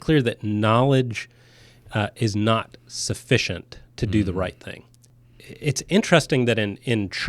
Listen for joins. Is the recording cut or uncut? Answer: cut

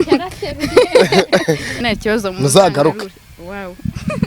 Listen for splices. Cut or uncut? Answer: cut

